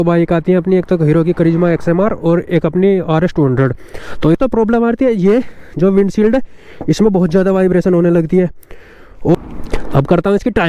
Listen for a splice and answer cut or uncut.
cut